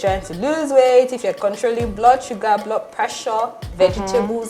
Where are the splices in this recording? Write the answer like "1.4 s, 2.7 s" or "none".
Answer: 1.3 s